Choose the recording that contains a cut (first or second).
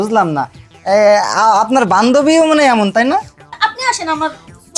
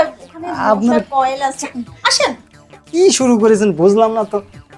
first